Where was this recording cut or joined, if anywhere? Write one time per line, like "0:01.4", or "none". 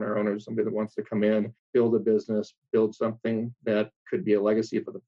0:01.6
0:04.0